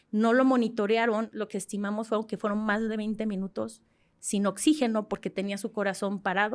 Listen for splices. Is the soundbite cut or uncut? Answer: cut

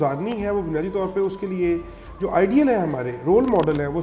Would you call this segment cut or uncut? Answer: uncut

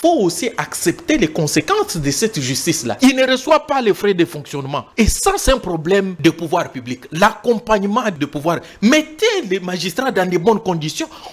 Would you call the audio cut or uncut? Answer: cut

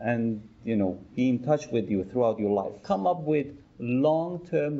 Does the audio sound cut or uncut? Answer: cut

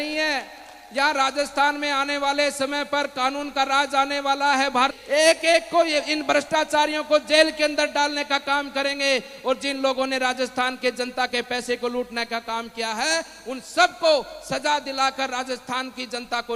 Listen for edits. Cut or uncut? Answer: cut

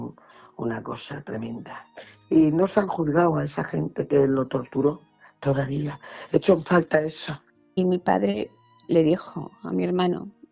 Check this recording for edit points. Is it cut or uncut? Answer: cut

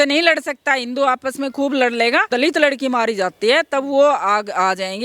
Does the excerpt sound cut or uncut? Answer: cut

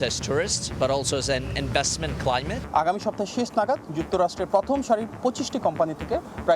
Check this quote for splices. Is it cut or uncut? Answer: cut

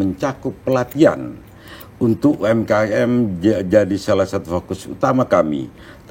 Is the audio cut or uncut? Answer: uncut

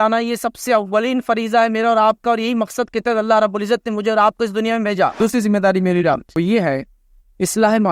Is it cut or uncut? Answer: cut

